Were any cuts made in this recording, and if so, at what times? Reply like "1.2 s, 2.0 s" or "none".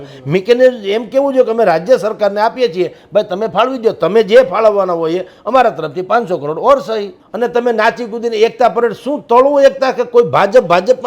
7.2 s